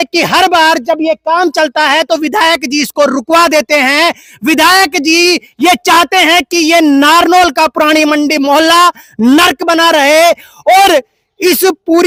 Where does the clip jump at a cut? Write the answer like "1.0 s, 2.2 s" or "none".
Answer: none